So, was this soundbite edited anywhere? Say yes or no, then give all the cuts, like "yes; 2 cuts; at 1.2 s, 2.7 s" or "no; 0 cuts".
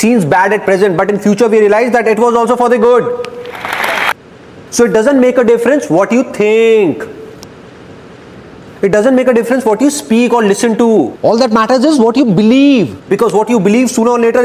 yes; 1 cut; at 4.1 s